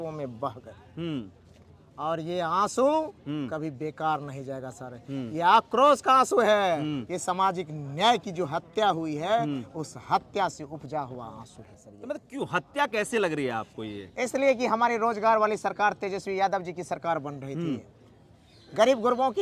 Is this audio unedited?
yes; 0 cuts

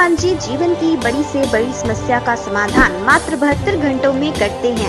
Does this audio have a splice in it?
no; 0 cuts

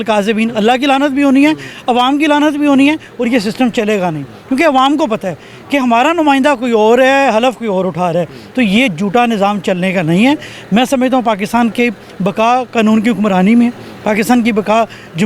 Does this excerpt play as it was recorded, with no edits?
yes; 0 cuts

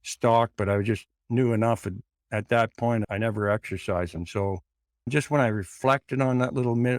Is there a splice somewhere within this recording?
yes; 2 cuts; at 3.1 s, 5.1 s

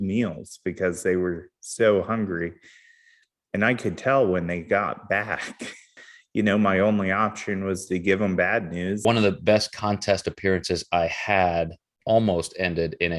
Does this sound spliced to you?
yes; 2 cuts; at 5.9 s, 9.0 s

